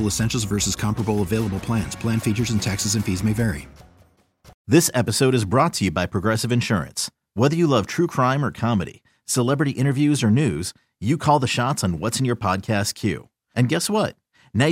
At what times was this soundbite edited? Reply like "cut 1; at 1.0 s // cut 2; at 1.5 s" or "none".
cut 1; at 4.5 s